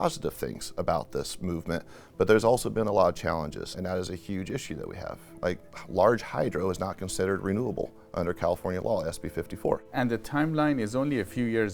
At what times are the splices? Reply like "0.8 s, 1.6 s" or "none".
3.7 s, 9.9 s